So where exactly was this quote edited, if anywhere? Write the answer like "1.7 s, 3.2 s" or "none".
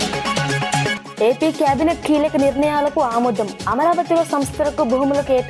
0.9 s